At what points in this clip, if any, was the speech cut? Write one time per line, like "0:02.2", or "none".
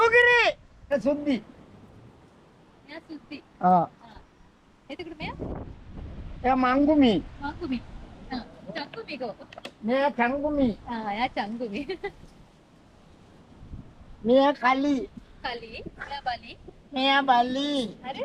0:00.9